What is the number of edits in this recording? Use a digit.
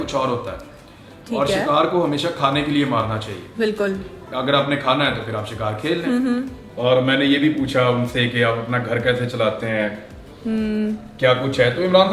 1